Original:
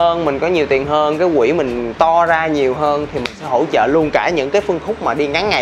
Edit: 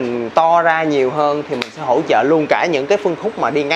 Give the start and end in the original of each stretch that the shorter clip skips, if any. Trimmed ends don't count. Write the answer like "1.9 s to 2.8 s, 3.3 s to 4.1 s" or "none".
none